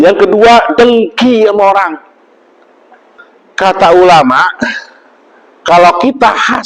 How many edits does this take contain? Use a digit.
1